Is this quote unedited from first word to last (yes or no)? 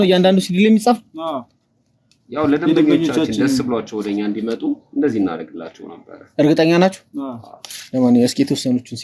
yes